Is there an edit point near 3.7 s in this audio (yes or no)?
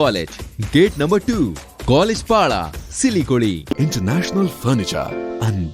yes